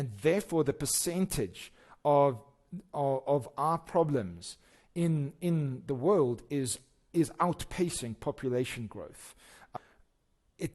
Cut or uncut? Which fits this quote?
cut